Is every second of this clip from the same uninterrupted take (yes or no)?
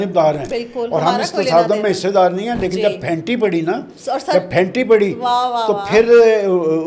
yes